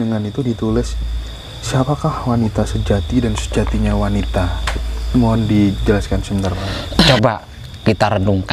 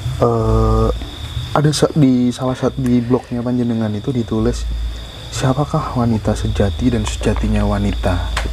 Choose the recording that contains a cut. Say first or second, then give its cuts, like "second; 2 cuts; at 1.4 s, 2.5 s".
first; 1 cut; at 7.1 s